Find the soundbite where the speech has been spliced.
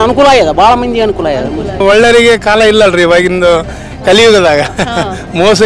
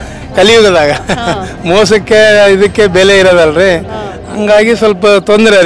first; 1 cut; at 1.8 s

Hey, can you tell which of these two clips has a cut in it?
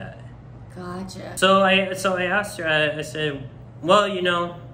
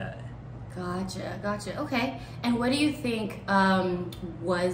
first; 1 cut; at 1.3 s

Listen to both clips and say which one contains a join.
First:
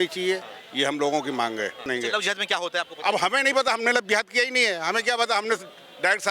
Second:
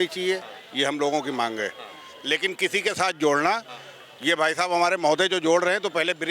first; 1 cut; at 1.8 s

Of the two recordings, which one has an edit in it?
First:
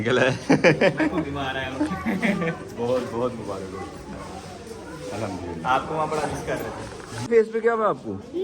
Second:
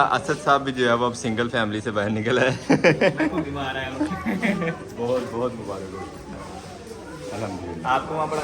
first; 1 cut; at 7.2 s

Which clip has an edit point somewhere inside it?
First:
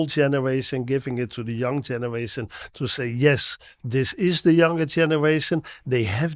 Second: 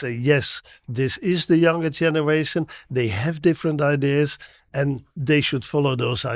second; 1 cut; at 5.1 s

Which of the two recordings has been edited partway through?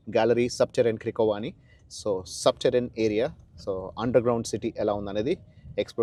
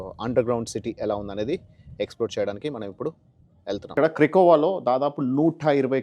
second; 1 cut; at 3.9 s

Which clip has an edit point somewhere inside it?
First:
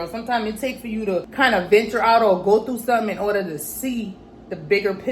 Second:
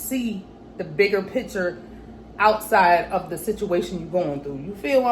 first; 1 cut; at 1.3 s

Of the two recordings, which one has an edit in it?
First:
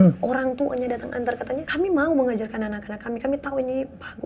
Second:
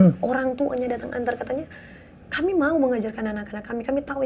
first; 1 cut; at 1.7 s

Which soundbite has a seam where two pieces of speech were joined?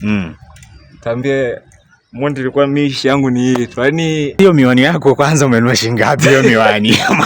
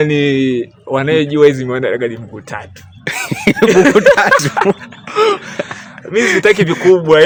first; 1 cut; at 4.3 s

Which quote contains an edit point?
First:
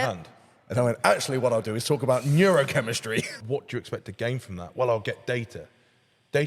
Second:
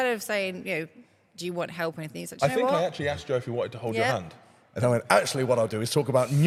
first; 1 cut; at 3.4 s

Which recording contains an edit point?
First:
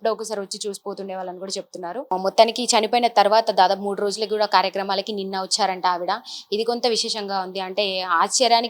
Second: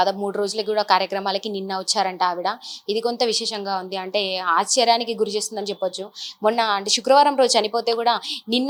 first; 1 cut; at 2.1 s

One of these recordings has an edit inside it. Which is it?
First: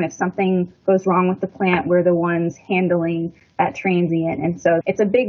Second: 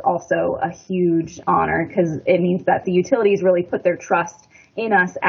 second; 2 cuts; at 1.4 s, 2.8 s

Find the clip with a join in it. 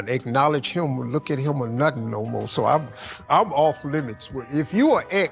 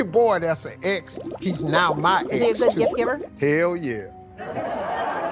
second; 1 cut; at 2.3 s

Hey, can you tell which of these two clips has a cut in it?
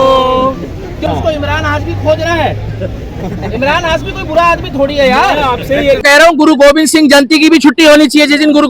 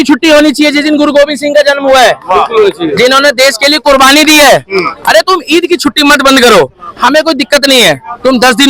first; 2 cuts; at 1.0 s, 6.0 s

